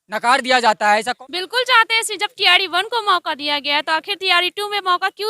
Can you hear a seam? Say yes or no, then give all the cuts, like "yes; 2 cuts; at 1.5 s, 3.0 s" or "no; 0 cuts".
yes; 1 cut; at 1.2 s